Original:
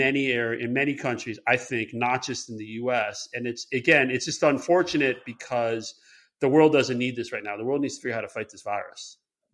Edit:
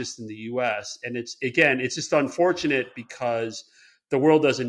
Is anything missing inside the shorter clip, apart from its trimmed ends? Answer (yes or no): no